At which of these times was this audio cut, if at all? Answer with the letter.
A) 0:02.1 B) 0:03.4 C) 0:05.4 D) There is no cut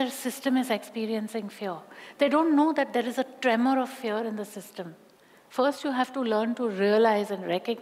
D